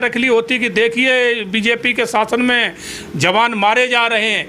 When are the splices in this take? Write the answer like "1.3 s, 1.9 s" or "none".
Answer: none